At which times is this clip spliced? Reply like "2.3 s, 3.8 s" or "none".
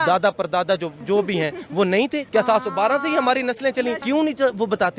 2.2 s, 4.0 s